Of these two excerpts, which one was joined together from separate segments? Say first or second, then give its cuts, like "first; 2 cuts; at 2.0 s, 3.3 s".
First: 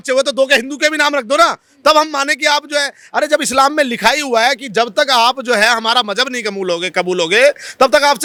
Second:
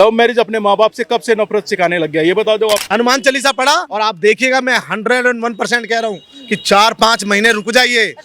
second; 2 cuts; at 2.8 s, 3.9 s